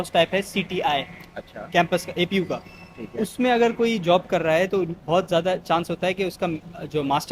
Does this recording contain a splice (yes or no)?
no